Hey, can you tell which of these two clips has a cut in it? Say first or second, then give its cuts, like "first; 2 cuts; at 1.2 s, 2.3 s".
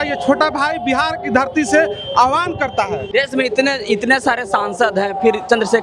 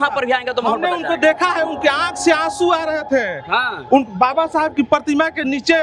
first; 1 cut; at 3.0 s